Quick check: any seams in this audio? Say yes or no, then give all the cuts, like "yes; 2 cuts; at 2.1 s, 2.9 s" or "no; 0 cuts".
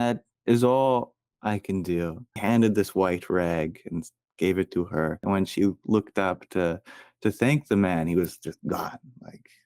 yes; 2 cuts; at 2.4 s, 5.2 s